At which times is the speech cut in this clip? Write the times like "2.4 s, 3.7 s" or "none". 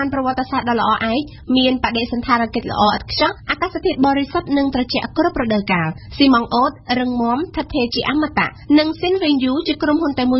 none

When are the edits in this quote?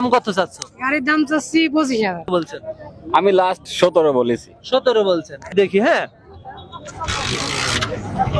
2.3 s, 5.5 s

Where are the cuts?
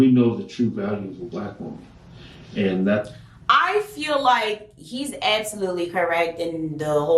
none

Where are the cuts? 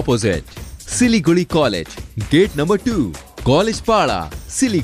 none

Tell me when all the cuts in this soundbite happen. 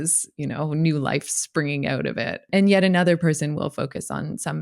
2.5 s

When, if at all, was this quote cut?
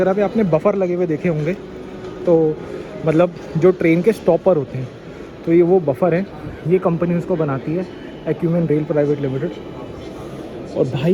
none

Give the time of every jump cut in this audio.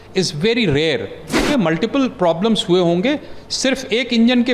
1.4 s

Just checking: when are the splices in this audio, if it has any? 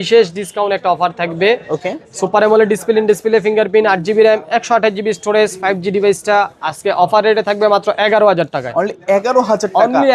none

